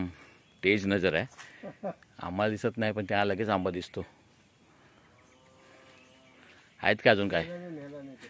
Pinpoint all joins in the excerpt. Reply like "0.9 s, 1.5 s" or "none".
none

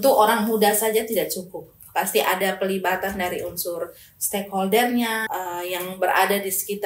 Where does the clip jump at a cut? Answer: 5.2 s

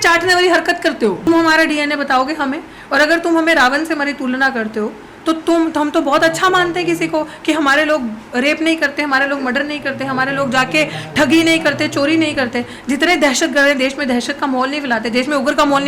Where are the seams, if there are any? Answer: 1.3 s

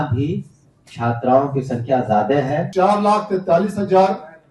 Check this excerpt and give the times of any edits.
2.7 s

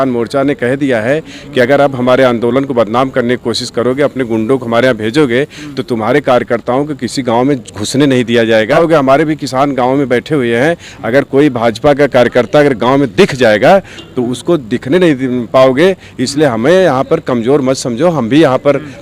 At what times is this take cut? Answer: 8.8 s

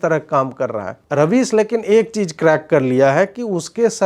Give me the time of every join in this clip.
1.0 s

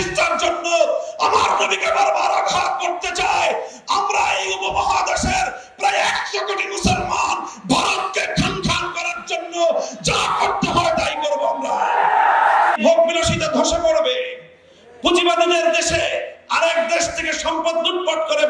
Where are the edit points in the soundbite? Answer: 12.7 s

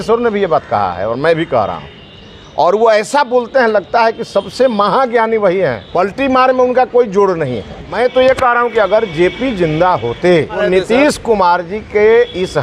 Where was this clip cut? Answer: 5.8 s, 7.8 s, 10.6 s

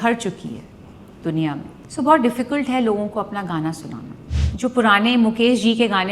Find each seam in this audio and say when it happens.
1.8 s, 4.3 s

